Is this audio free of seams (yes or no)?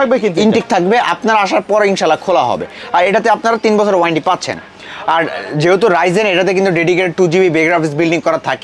yes